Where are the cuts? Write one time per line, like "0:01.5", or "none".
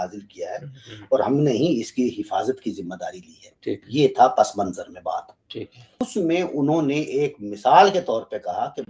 0:06.0